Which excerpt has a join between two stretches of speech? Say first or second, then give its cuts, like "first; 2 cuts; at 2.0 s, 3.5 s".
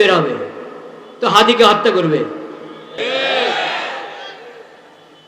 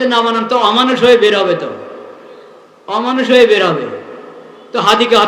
first; 1 cut; at 2.8 s